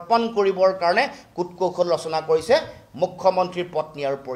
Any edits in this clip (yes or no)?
no